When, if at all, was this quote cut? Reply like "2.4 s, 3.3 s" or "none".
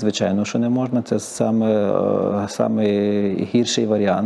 none